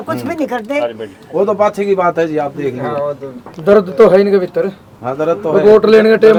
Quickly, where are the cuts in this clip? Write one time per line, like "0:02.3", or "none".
none